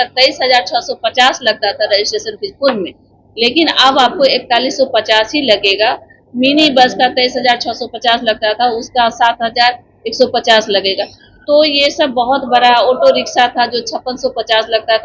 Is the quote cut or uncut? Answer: uncut